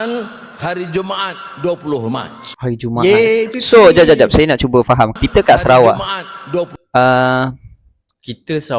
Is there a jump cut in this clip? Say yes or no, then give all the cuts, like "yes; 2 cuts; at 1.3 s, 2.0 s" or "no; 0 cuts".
yes; 1 cut; at 2.4 s